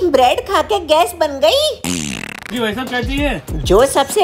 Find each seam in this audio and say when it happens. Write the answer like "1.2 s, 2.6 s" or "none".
2.5 s

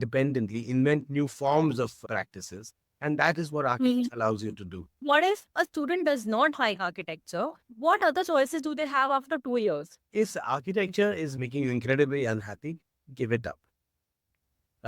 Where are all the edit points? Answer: 5.0 s, 9.9 s

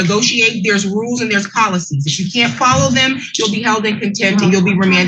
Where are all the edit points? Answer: none

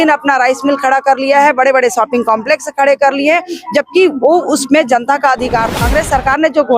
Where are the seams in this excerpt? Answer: 5.8 s

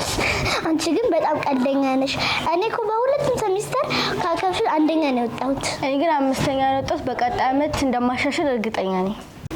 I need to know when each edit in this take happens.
none

